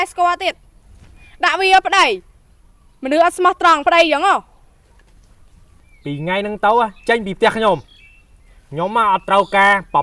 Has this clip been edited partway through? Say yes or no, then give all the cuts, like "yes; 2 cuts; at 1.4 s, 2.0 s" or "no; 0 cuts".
no; 0 cuts